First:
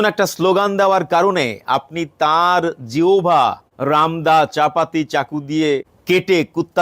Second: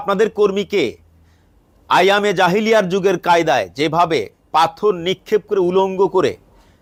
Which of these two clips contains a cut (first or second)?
first